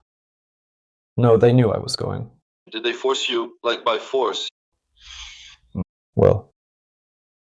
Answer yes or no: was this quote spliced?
no